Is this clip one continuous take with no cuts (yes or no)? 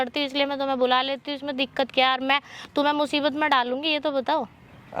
yes